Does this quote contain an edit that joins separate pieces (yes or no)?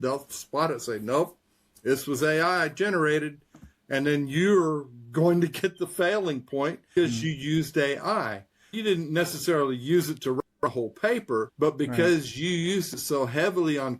yes